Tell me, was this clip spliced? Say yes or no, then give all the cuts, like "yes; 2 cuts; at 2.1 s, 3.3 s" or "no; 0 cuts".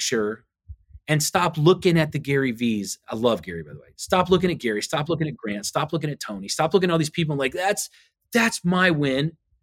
no; 0 cuts